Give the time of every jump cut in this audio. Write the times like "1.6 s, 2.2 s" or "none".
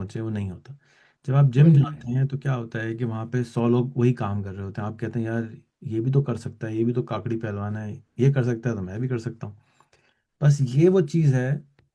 none